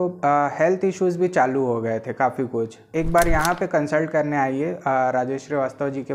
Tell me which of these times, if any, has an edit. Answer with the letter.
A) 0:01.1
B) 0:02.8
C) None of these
B